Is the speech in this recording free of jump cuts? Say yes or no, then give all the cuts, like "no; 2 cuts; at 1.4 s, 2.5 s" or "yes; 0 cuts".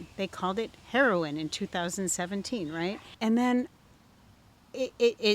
no; 1 cut; at 3.1 s